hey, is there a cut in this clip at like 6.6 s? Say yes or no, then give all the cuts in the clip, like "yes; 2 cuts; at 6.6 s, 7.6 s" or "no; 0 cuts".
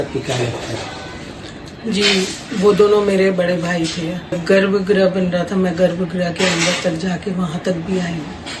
no; 1 cut; at 4.4 s